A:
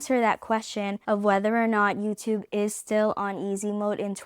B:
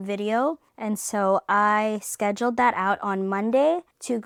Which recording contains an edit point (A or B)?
A